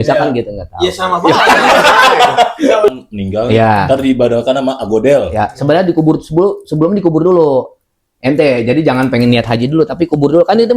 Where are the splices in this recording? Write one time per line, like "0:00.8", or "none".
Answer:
0:02.9